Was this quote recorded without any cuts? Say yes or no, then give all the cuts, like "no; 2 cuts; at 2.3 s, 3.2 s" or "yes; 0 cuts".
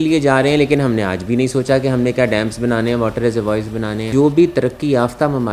no; 1 cut; at 4.1 s